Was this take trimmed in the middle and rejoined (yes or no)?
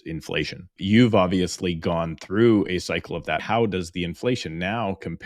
yes